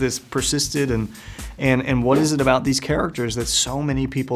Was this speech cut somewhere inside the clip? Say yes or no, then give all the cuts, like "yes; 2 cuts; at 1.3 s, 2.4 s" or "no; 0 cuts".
no; 0 cuts